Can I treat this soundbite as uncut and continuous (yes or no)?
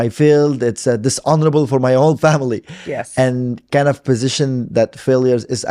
yes